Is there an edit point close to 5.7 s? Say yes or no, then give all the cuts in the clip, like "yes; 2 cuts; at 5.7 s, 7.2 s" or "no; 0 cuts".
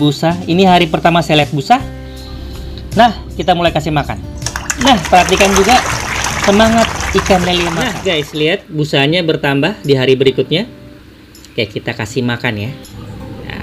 no; 1 cut; at 7.9 s